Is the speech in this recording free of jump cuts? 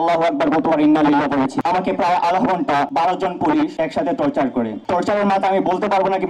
no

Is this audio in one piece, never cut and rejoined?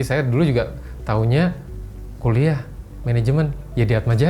yes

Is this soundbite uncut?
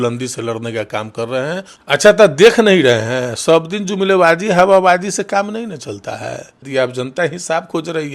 no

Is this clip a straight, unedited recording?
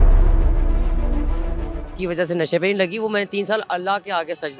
no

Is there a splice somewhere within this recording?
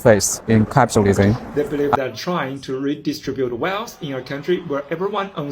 yes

